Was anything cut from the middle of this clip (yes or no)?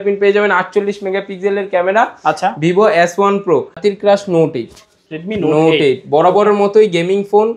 yes